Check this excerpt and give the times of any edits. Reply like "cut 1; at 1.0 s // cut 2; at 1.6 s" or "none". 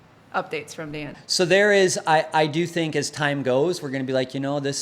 cut 1; at 1.2 s

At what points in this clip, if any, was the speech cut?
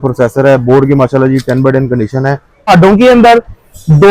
cut 1; at 2.7 s

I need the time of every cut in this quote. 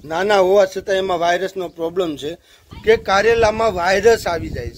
cut 1; at 2.6 s

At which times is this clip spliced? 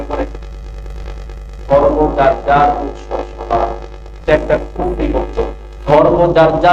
cut 1; at 4.2 s // cut 2; at 5.7 s

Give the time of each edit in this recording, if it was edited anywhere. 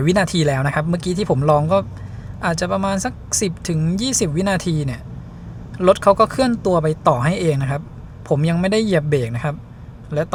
none

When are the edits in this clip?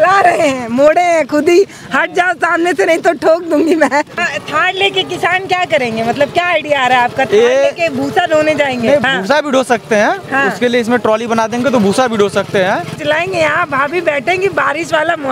cut 1; at 4.2 s // cut 2; at 9.1 s // cut 3; at 13.0 s

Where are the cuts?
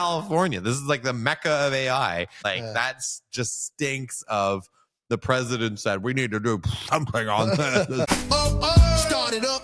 cut 1; at 2.4 s // cut 2; at 8.1 s

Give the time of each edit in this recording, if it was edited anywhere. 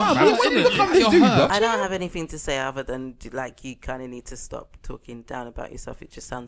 cut 1; at 1.5 s

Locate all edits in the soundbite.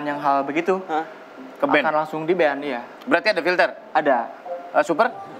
none

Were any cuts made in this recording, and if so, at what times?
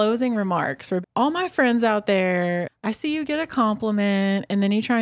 cut 1; at 1.0 s // cut 2; at 2.7 s

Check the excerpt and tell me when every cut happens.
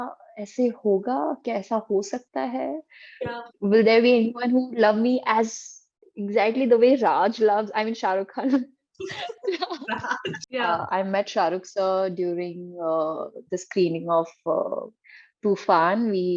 cut 1; at 10.4 s

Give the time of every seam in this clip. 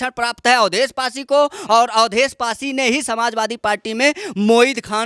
none

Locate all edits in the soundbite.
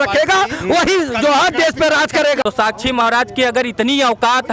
cut 1; at 2.4 s

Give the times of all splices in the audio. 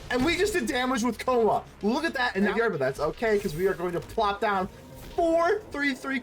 cut 1; at 2.5 s

